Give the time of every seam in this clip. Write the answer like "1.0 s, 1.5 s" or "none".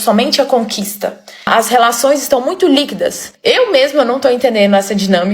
1.5 s, 3.2 s